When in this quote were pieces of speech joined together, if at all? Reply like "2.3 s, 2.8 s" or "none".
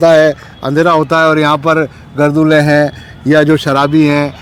none